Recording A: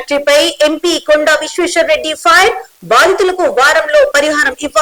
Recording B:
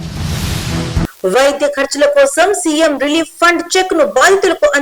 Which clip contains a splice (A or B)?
B